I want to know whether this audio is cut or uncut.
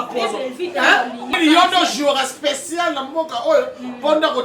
cut